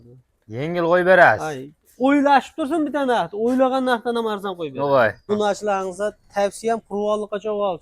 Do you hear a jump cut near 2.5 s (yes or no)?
no